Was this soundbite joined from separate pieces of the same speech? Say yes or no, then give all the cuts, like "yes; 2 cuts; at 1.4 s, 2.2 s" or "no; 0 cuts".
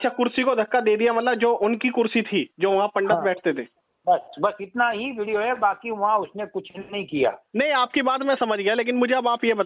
yes; 1 cut; at 7.4 s